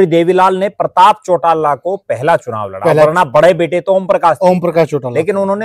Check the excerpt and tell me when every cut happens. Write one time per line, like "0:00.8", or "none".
none